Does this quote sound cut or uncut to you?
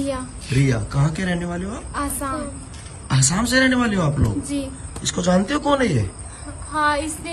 uncut